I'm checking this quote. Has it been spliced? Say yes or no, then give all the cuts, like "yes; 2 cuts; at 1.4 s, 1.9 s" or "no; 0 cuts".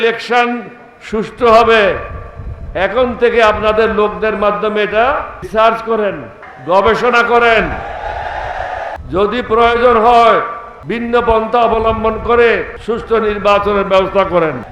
no; 0 cuts